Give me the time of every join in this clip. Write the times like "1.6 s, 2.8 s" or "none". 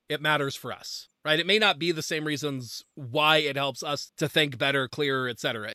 none